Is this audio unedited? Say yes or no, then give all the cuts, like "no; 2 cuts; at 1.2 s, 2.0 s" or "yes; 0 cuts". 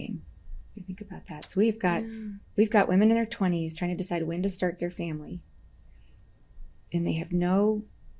yes; 0 cuts